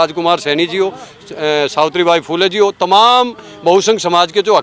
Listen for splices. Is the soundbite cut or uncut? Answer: uncut